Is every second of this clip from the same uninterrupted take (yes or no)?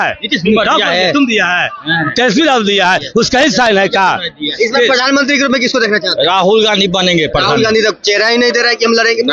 yes